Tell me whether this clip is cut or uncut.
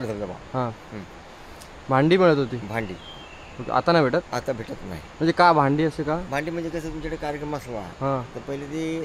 uncut